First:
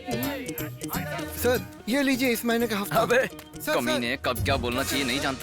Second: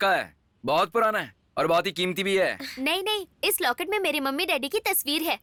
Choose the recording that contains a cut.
first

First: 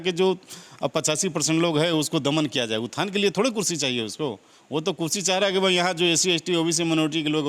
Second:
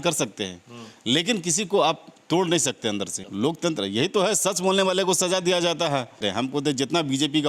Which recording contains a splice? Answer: second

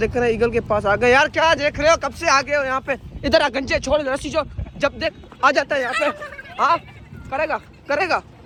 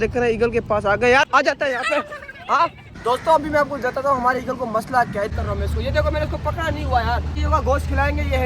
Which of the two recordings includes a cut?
second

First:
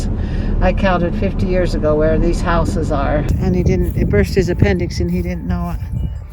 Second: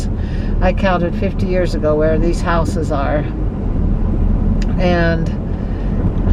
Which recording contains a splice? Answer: first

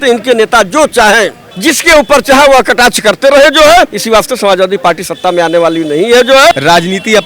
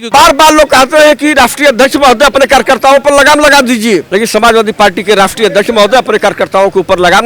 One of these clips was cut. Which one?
first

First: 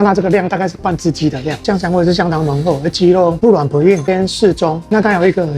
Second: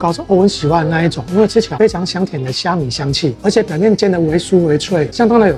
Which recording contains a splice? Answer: first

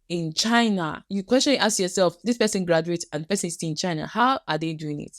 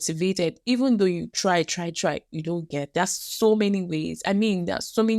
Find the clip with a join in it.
first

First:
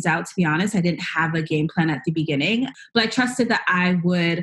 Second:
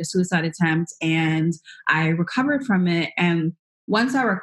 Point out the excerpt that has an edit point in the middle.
first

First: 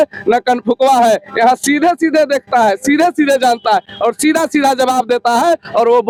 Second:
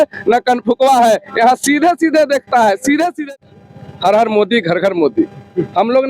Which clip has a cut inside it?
second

